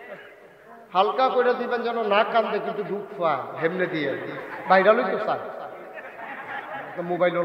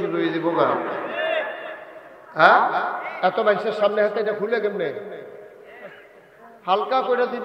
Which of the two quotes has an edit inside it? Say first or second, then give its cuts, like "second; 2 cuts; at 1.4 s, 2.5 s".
first; 1 cut; at 4.5 s